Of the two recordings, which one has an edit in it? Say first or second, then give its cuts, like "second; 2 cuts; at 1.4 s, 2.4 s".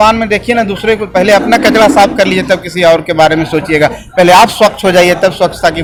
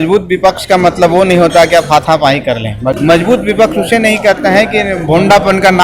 second; 1 cut; at 3.0 s